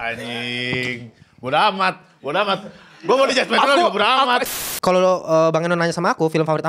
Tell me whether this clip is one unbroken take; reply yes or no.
no